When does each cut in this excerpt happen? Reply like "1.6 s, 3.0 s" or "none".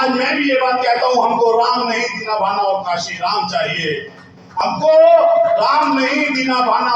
none